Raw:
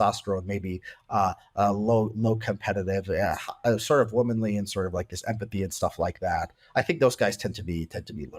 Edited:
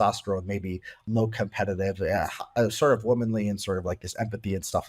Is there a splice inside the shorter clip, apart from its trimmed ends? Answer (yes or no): yes